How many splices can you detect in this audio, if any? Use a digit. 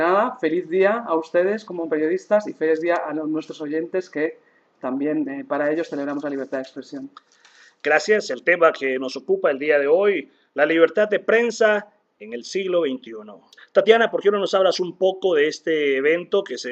1